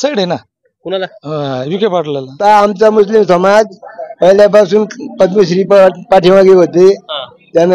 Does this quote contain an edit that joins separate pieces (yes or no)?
yes